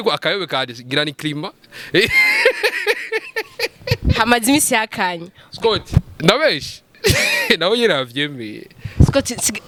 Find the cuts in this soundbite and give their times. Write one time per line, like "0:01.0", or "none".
none